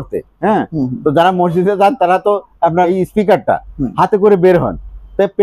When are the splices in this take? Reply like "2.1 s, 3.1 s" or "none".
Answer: 2.9 s